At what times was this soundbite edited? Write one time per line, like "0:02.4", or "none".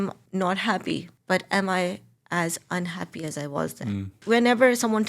0:04.1